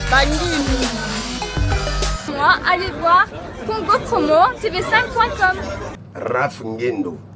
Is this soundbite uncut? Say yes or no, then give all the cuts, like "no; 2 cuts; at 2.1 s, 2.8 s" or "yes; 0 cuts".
no; 1 cut; at 2.3 s